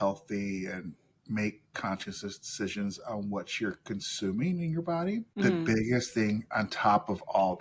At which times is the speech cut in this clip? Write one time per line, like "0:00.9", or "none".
0:05.3